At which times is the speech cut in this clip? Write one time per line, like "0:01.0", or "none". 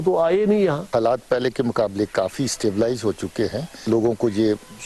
0:00.8
0:03.9